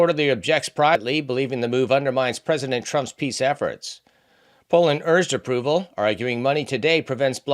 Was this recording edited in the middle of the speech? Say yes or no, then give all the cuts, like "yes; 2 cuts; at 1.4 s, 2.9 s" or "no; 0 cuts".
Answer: yes; 1 cut; at 1.0 s